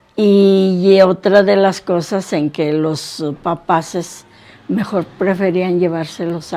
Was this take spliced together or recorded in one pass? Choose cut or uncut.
uncut